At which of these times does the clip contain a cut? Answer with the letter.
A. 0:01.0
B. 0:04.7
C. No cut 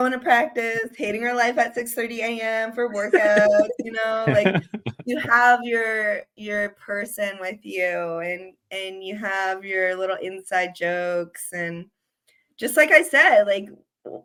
C